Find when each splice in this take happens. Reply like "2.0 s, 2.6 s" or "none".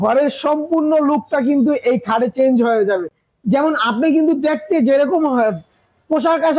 none